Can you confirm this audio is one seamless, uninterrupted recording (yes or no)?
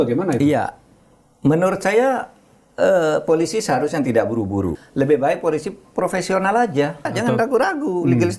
no